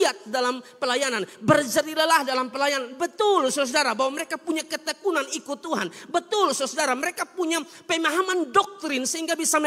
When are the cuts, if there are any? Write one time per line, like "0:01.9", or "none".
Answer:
none